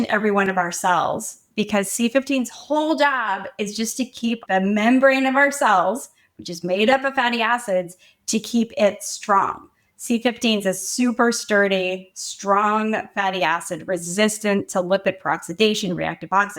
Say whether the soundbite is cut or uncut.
cut